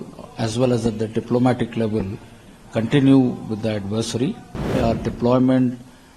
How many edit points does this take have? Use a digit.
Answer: 1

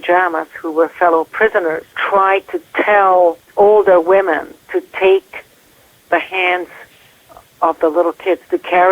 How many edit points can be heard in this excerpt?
2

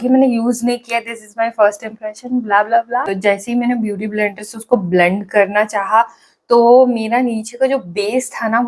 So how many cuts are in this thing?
1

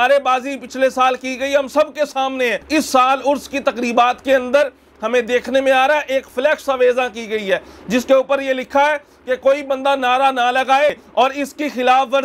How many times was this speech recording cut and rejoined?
2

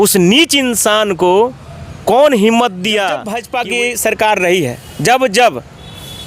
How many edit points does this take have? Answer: 1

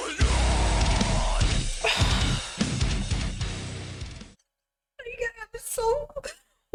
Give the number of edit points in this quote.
0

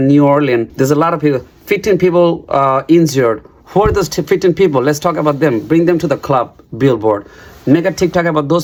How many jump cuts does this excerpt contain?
0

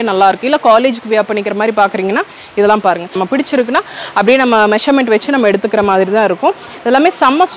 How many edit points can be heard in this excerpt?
1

